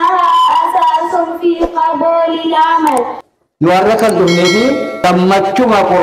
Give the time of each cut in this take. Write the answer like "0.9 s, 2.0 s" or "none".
3.2 s, 5.0 s